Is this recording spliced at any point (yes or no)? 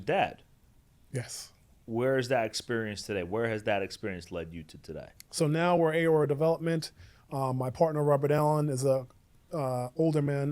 yes